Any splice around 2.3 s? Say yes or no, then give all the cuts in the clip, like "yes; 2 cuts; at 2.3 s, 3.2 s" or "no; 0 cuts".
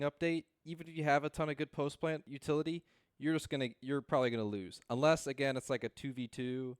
yes; 1 cut; at 2.3 s